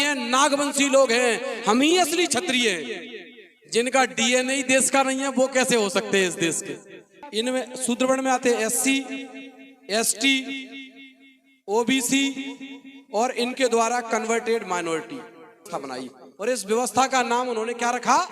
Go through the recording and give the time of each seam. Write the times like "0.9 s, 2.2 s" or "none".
7.0 s, 15.7 s